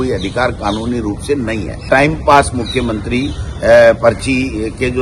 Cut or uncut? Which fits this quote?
cut